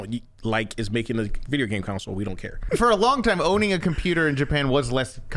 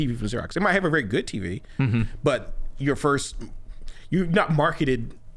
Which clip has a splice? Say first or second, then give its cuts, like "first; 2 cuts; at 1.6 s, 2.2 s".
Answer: first; 1 cut; at 2.6 s